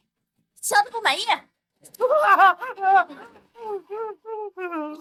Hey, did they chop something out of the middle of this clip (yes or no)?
no